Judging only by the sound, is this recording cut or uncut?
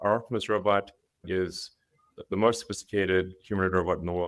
uncut